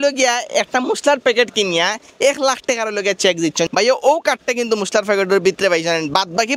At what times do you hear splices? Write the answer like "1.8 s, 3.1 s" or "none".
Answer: 3.7 s